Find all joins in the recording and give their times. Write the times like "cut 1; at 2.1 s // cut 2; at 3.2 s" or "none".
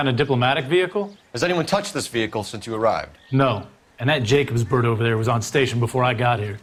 none